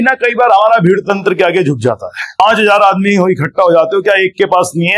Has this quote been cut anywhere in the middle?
yes; 1 cut; at 2.4 s

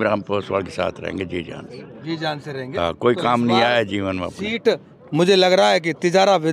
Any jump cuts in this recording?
no; 0 cuts

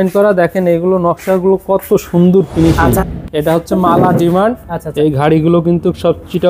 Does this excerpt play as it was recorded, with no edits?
no; 1 cut; at 3.0 s

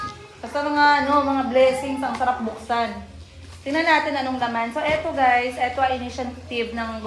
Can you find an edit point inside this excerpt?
no; 0 cuts

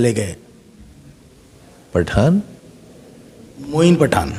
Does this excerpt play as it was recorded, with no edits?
yes; 0 cuts

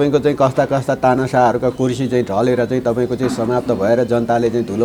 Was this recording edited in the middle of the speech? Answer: no; 0 cuts

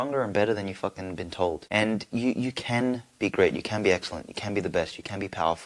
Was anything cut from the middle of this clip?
yes; 1 cut; at 1.6 s

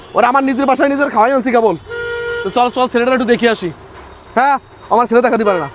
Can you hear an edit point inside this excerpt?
no; 0 cuts

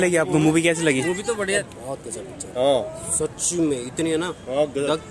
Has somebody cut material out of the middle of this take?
yes; 1 cut; at 1.6 s

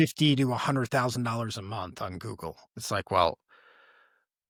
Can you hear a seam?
no; 0 cuts

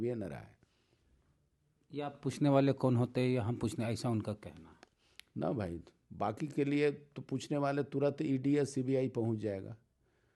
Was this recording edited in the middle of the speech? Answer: no; 0 cuts

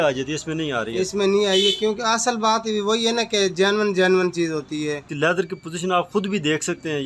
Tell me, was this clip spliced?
yes; 1 cut; at 5.1 s

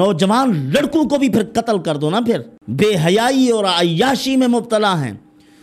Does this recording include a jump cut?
yes; 1 cut; at 2.6 s

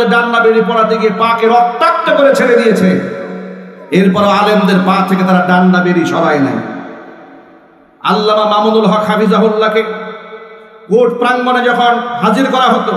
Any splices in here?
no; 0 cuts

